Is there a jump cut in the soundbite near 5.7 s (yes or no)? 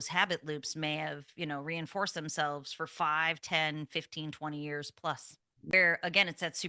yes